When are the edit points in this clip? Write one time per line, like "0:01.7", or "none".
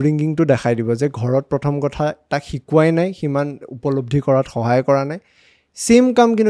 none